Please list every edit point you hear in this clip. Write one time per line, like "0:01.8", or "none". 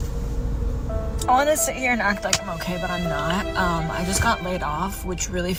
none